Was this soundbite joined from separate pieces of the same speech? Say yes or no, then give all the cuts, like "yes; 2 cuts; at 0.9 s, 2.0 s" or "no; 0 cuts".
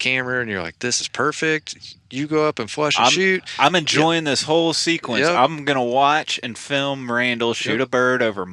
no; 0 cuts